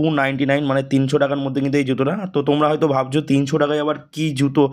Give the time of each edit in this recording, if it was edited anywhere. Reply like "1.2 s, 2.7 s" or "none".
none